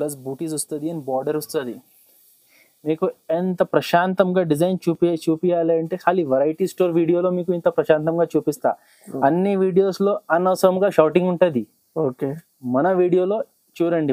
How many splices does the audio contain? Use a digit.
0